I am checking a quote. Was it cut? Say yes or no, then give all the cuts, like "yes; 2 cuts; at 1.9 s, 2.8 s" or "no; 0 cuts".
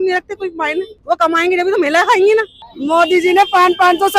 yes; 1 cut; at 2.5 s